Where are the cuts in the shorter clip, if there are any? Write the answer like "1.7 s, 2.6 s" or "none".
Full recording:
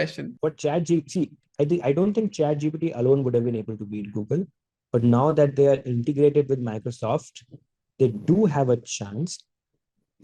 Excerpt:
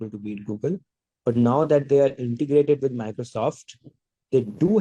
none